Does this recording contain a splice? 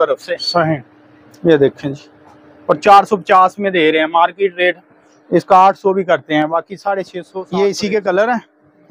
yes; 1 cut; at 7.2 s

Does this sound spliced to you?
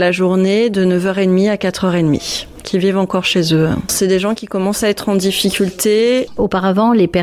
yes; 1 cut; at 6.3 s

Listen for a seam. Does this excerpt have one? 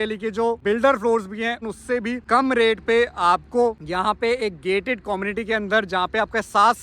yes; 1 cut; at 1.7 s

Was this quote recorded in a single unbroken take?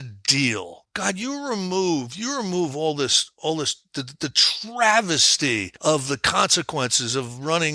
no; 2 cuts; at 0.9 s, 5.7 s

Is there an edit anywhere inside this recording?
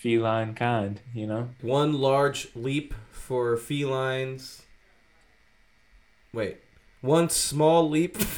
yes; 1 cut; at 1.6 s

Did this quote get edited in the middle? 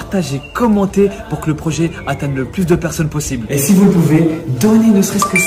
no; 0 cuts

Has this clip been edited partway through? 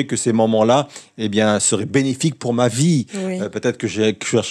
no; 0 cuts

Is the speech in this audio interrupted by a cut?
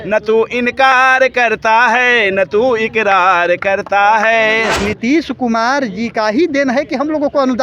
yes; 1 cut; at 4.7 s

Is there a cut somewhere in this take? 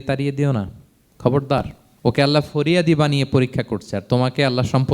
yes; 1 cut; at 1.8 s

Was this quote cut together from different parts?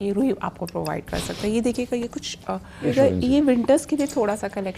yes; 1 cut; at 2.9 s

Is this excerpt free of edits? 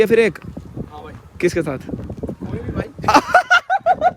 yes; 0 cuts

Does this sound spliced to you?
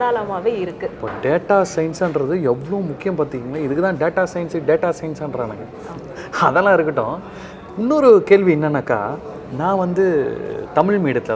no; 0 cuts

